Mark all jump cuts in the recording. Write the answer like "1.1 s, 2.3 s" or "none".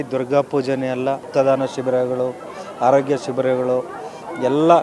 1.2 s